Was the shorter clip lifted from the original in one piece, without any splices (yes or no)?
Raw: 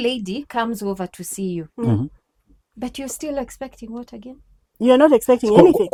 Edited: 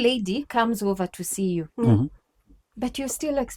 yes